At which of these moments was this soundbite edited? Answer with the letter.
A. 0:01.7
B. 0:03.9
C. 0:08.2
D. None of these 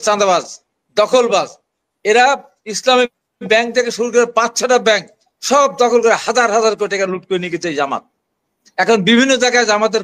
D